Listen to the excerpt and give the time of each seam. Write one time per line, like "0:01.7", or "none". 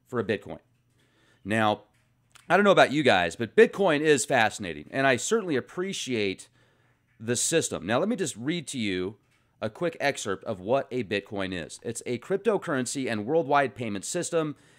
0:12.0

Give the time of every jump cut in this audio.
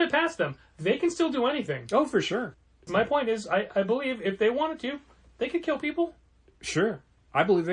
0:02.7

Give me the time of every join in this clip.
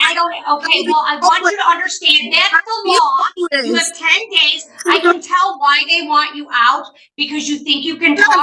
none

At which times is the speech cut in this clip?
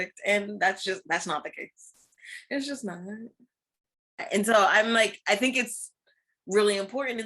0:04.2

